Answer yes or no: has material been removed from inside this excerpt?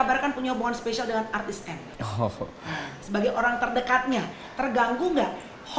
yes